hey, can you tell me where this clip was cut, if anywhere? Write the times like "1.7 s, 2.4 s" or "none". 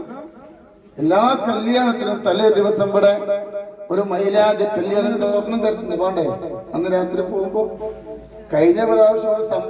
5.3 s